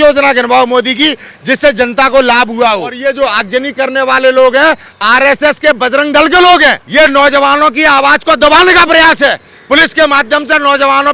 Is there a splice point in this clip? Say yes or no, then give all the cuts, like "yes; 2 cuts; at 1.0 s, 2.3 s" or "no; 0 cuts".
yes; 2 cuts; at 2.9 s, 6.8 s